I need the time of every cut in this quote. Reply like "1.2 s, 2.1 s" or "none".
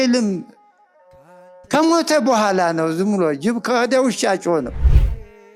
none